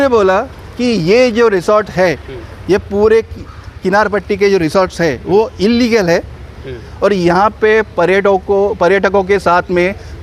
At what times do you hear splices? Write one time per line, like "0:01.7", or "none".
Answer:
none